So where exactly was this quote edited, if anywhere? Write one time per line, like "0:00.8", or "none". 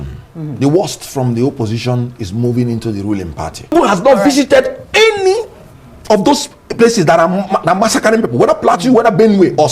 0:03.7